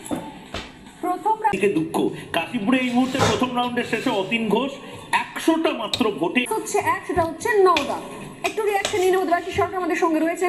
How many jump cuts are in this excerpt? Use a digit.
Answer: 2